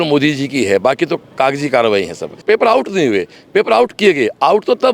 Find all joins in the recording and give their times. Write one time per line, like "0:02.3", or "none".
0:02.4